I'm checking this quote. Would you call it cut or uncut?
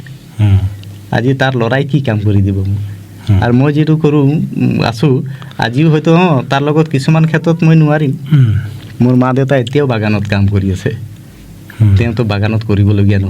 uncut